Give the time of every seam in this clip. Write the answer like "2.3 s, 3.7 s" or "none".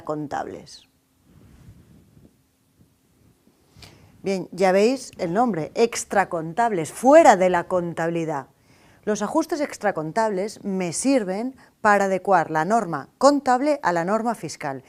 none